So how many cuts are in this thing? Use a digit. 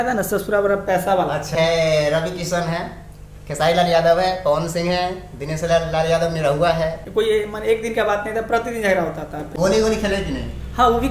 3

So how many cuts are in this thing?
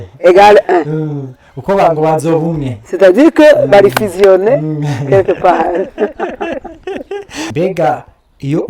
1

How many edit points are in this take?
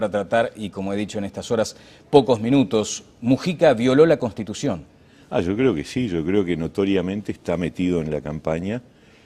0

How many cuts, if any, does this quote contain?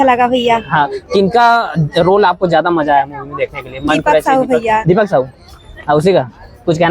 0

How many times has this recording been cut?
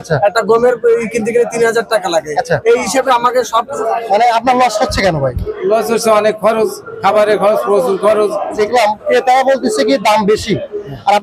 2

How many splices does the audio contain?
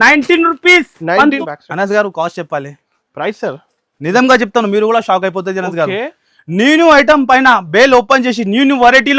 1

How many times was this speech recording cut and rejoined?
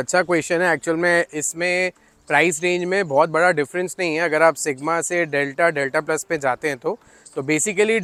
0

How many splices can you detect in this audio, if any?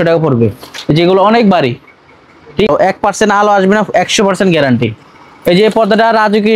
1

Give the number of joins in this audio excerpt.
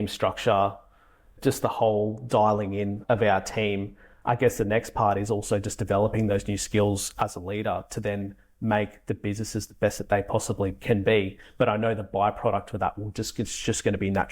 4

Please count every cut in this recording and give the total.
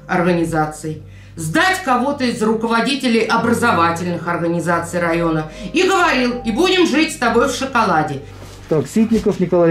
1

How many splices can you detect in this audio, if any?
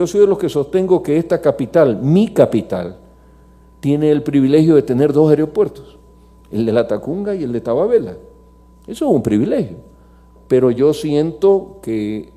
1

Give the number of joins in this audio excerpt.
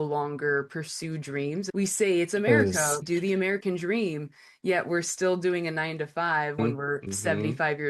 3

